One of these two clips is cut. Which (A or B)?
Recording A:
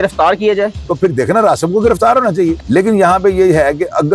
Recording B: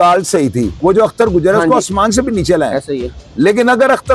A